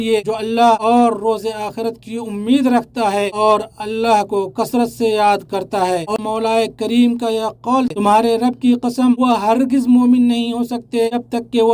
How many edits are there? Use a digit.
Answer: 2